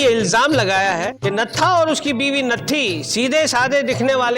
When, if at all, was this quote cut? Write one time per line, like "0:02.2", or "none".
0:01.1